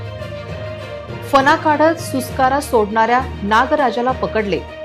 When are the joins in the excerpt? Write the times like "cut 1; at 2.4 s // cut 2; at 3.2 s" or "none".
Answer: cut 1; at 1.3 s